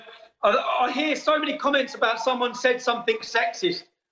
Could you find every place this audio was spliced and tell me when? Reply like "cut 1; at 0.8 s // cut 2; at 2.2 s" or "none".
none